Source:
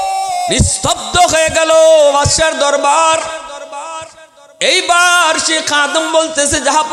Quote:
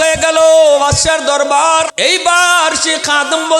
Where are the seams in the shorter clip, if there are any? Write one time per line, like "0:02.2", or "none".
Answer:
0:01.9